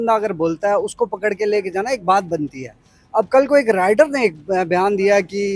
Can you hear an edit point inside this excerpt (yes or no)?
no